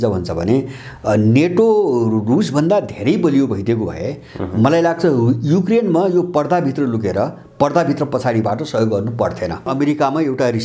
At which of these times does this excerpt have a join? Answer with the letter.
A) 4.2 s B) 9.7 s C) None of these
B